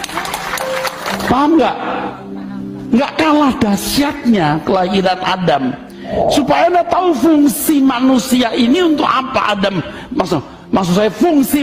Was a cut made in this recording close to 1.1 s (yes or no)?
yes